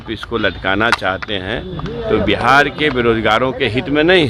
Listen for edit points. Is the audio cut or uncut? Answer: uncut